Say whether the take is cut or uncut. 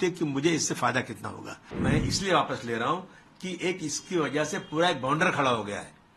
cut